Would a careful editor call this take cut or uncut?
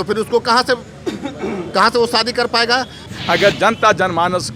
cut